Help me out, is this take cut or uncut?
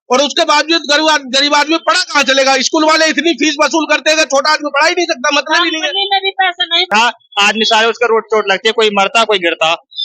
cut